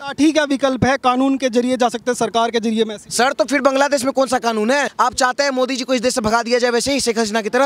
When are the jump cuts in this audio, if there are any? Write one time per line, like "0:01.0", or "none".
0:04.9